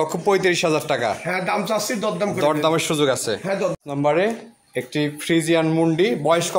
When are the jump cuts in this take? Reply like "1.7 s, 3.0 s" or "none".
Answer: 3.8 s